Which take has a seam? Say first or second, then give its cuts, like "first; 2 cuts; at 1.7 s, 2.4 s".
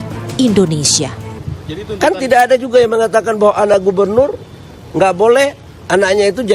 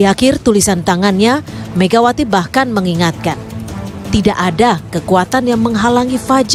first; 1 cut; at 1.4 s